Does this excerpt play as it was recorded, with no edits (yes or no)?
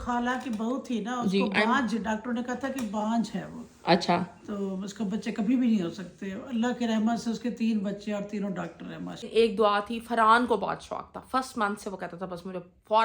no